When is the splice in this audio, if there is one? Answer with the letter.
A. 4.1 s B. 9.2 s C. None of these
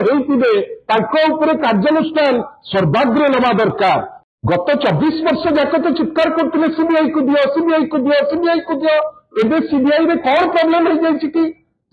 A